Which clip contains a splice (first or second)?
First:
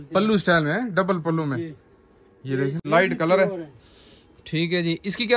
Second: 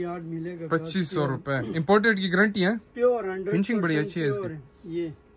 first